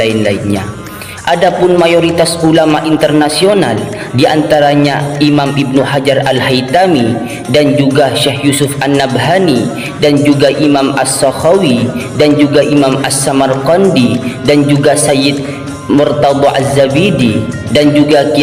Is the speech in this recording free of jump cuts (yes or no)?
yes